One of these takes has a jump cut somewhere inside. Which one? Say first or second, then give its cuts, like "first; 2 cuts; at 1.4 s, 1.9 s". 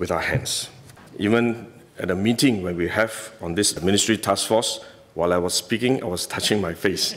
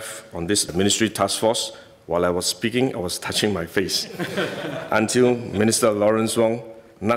first; 1 cut; at 1.0 s